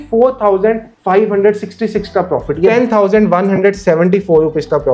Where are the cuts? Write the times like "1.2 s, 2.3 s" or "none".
2.7 s